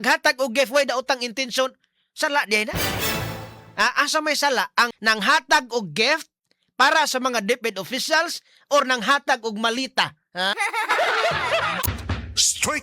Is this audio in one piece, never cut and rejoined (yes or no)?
no